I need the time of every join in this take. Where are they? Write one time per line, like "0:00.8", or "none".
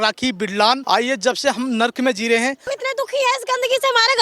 0:00.8
0:02.7